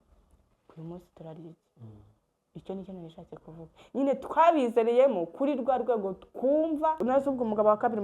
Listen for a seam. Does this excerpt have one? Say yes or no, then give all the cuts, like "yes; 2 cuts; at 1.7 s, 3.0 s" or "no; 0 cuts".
yes; 1 cut; at 7.0 s